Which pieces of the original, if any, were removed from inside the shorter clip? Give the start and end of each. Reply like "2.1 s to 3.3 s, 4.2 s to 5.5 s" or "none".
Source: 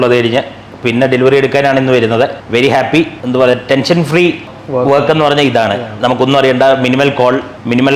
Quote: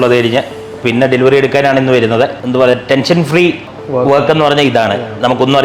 2.4 s to 3.2 s